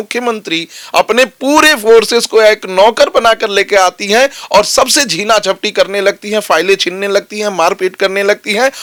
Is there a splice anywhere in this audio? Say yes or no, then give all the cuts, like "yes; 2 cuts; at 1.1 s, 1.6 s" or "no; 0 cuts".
no; 0 cuts